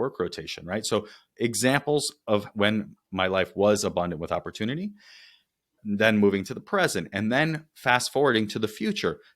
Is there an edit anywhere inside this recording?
yes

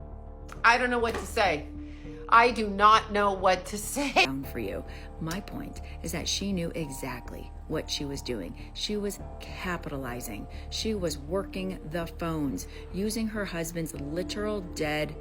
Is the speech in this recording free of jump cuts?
no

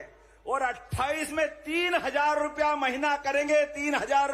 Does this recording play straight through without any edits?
yes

